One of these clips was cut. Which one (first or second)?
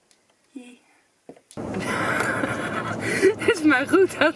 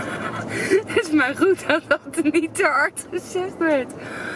first